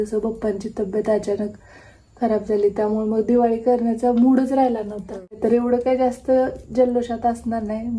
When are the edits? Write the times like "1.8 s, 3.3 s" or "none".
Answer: 5.3 s

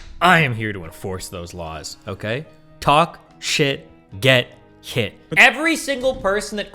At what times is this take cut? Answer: 5.2 s

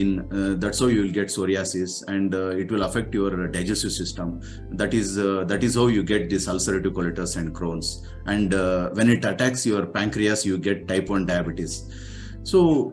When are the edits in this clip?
none

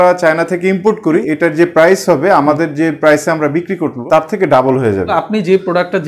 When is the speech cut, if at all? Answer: 1.2 s, 4.0 s, 5.1 s

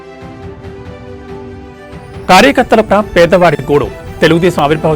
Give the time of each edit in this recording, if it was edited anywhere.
1.2 s

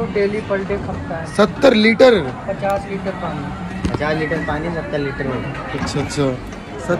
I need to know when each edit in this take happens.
none

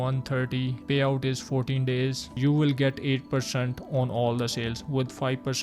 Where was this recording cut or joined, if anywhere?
2.4 s

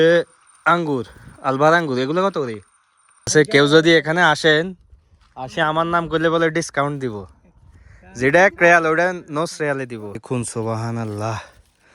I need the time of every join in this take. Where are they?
3.3 s, 10.2 s

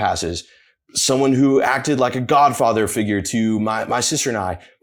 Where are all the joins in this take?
none

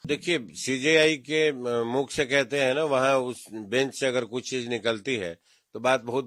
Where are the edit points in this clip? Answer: none

